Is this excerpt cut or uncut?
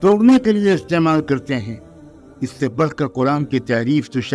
uncut